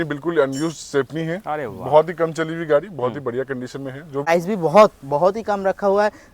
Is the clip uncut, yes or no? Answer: no